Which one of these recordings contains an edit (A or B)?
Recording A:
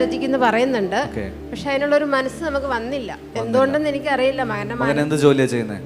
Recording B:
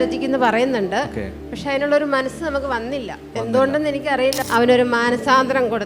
B